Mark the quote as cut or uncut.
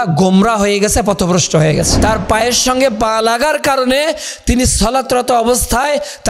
cut